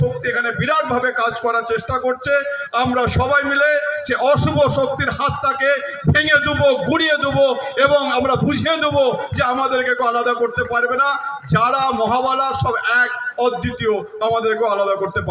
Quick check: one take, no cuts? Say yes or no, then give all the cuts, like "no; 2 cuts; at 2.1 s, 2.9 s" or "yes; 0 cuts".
yes; 0 cuts